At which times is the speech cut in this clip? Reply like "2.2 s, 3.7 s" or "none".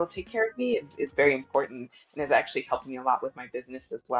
none